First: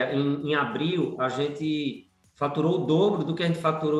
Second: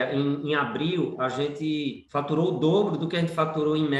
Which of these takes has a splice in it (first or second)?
second